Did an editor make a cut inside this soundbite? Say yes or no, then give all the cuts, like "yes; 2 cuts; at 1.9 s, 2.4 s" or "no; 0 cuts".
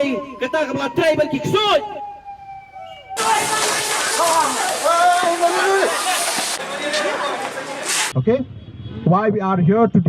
yes; 1 cut; at 3.2 s